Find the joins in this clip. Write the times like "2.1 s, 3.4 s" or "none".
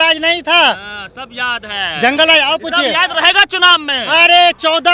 none